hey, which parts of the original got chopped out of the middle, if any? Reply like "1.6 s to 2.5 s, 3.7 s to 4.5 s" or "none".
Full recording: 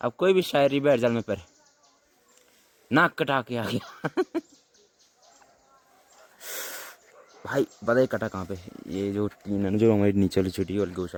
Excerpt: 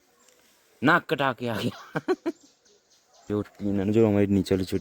5.4 s to 9.1 s

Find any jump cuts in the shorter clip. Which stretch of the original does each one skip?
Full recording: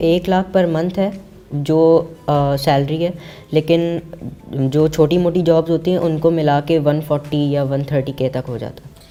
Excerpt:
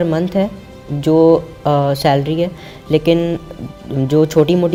none

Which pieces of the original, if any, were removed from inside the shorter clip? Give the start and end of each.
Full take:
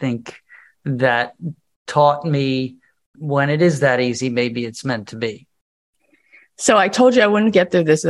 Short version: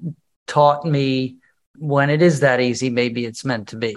none

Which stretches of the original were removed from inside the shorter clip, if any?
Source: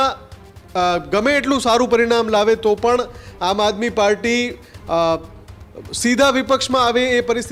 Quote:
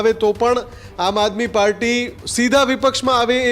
4.6 s to 5.9 s

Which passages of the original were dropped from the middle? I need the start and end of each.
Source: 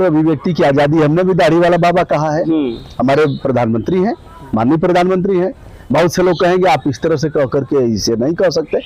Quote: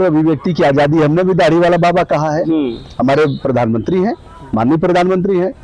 none

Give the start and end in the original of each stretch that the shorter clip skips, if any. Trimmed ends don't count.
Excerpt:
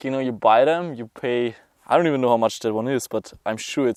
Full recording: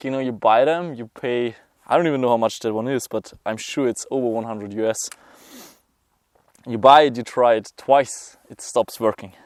none

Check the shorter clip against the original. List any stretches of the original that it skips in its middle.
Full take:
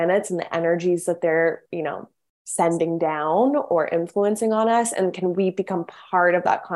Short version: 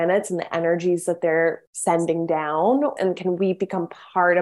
1.7 s to 2.4 s, 3.7 s to 4.9 s

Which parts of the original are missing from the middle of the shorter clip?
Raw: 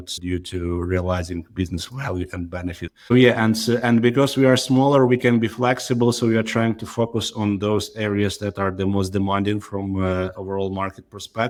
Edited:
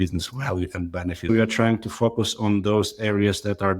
2.8 s to 6.2 s

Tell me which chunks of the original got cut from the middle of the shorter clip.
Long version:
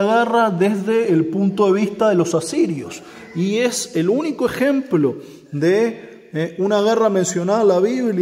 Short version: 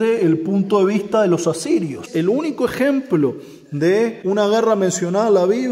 2.9 s to 3.8 s, 6.0 s to 6.5 s

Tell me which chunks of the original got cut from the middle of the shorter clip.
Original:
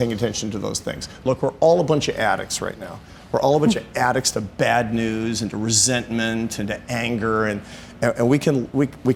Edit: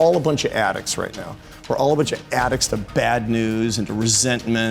none

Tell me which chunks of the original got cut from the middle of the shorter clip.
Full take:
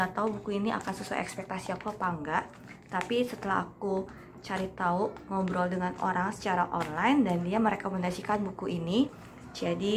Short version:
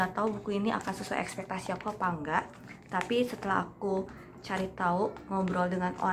none

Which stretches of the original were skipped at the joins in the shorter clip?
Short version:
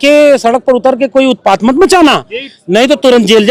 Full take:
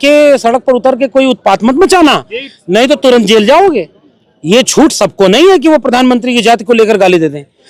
none

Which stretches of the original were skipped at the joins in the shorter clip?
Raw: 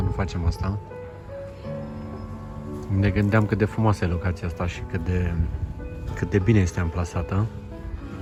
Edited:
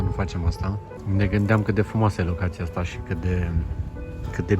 1.0 s to 2.8 s

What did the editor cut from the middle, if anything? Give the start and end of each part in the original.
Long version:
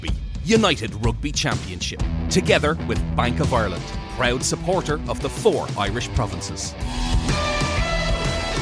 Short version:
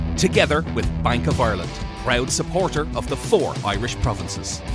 none

